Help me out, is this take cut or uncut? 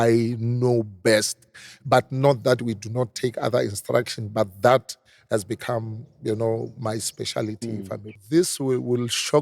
cut